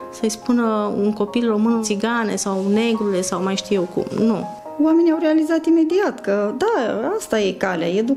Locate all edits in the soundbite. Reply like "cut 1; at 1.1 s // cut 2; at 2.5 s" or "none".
cut 1; at 1.8 s // cut 2; at 4.5 s